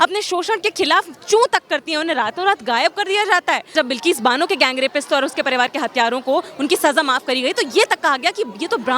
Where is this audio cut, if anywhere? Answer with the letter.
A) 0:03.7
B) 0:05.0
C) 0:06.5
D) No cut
A